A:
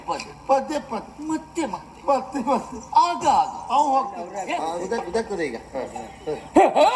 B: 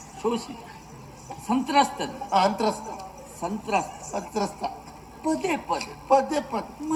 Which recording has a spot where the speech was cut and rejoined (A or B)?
A